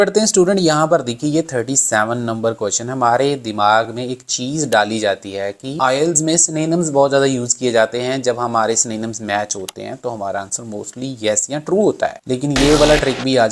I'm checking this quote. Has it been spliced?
no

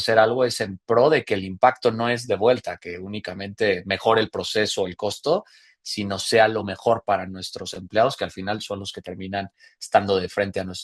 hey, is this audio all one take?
yes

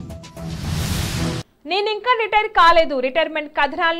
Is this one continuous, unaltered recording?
yes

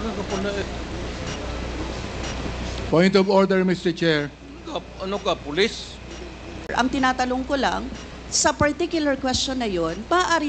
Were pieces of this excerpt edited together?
yes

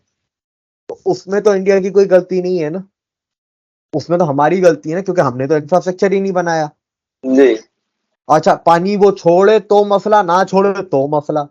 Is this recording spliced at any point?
no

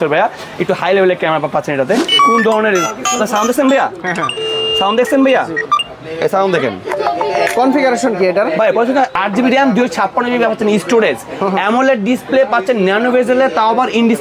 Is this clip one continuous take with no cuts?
no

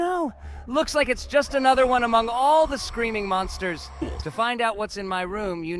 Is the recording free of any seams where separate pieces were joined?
no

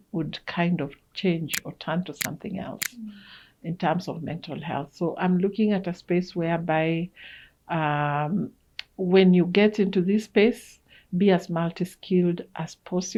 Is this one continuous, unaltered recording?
yes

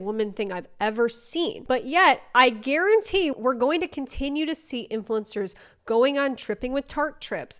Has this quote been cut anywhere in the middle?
no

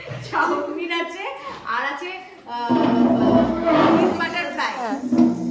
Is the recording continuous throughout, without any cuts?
yes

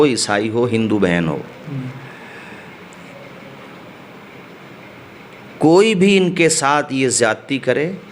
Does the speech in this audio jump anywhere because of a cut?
no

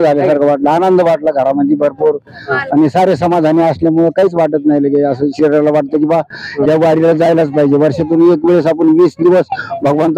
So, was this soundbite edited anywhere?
no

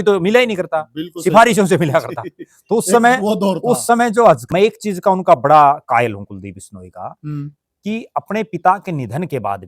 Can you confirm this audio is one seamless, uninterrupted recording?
no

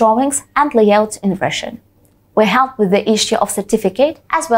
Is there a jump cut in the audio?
no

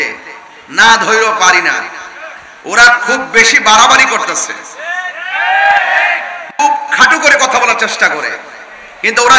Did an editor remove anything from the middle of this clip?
no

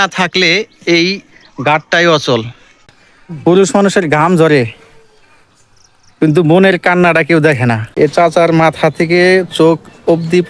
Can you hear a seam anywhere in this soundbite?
yes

